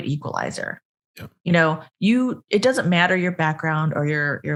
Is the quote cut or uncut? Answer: uncut